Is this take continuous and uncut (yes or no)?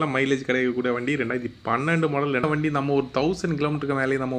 no